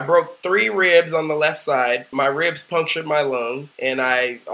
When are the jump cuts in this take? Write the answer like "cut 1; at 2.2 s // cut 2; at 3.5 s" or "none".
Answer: cut 1; at 2.1 s // cut 2; at 3.7 s